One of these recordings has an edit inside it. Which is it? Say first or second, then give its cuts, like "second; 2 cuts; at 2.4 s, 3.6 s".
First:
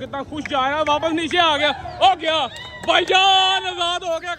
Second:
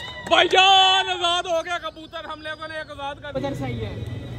second; 1 cut; at 3.4 s